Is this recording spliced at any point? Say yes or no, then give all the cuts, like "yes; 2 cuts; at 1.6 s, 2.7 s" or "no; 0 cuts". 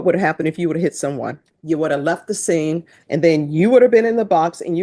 yes; 2 cuts; at 1.5 s, 2.9 s